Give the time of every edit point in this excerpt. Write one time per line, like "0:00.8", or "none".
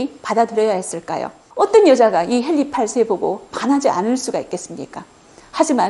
0:01.4